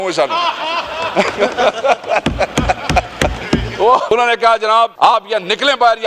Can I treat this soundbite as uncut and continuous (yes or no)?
no